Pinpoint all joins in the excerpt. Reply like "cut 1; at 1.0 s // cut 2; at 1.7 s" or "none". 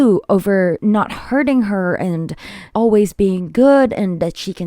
cut 1; at 0.8 s // cut 2; at 2.7 s